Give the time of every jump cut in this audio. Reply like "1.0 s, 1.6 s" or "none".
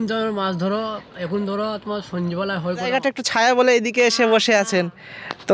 3.2 s